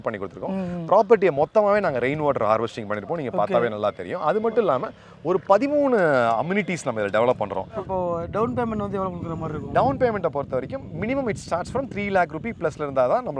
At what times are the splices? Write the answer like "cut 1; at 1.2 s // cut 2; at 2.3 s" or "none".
cut 1; at 7.9 s

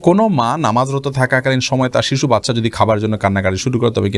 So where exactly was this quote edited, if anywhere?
none

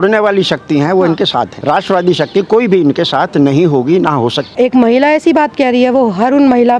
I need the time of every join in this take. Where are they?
cut 1; at 1.5 s // cut 2; at 4.5 s

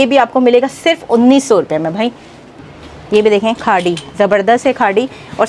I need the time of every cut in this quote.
cut 1; at 2.7 s

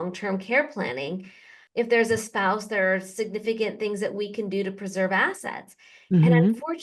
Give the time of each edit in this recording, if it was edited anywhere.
cut 1; at 1.6 s

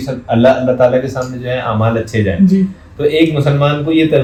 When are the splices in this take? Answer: none

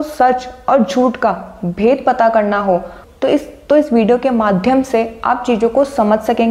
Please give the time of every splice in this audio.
none

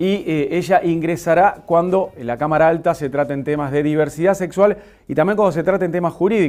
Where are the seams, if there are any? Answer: none

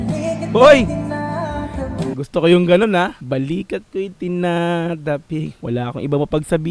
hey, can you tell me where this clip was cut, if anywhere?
cut 1; at 3.2 s // cut 2; at 5.5 s

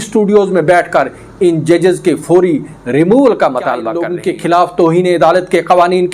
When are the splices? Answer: cut 1; at 4.0 s

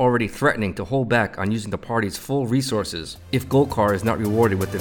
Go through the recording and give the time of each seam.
none

